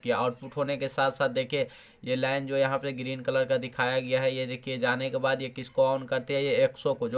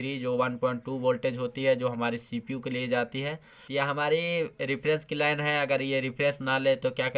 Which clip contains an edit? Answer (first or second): second